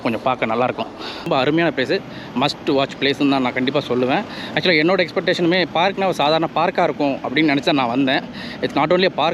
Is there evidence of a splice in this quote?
yes; 1 cut; at 1.3 s

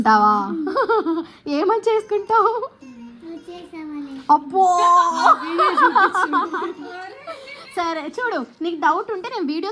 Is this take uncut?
yes; 0 cuts

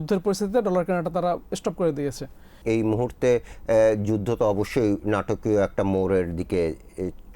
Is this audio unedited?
no; 1 cut; at 2.6 s

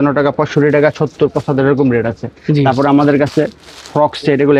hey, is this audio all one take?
yes; 0 cuts

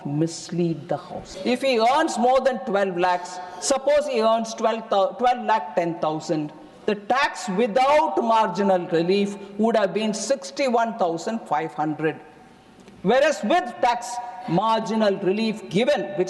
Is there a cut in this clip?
yes; 1 cut; at 1.3 s

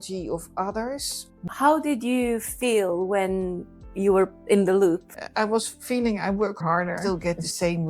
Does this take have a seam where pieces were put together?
yes; 3 cuts; at 1.5 s, 5.2 s, 7.0 s

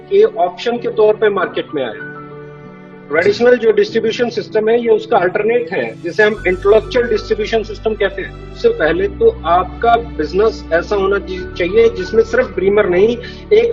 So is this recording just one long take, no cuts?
no; 1 cut; at 8.5 s

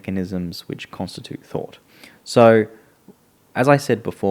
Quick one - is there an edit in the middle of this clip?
no; 0 cuts

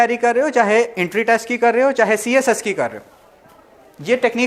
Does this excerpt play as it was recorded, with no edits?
yes; 0 cuts

